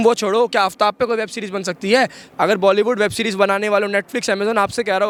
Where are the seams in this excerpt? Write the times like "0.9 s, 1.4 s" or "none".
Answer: none